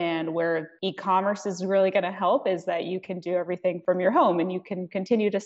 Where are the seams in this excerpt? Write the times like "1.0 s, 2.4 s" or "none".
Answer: none